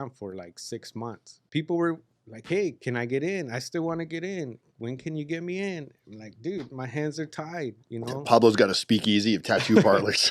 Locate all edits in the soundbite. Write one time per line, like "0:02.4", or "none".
0:01.3